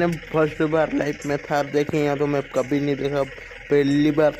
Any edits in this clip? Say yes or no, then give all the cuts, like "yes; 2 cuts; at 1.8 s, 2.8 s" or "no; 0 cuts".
no; 0 cuts